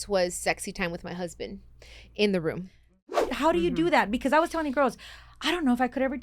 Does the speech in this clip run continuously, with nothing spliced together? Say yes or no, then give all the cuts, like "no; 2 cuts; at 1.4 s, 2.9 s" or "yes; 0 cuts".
no; 1 cut; at 3.1 s